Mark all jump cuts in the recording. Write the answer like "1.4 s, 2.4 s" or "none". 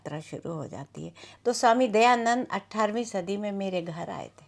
1.2 s